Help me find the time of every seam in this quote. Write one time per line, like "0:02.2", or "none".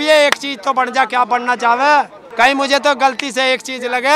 0:02.2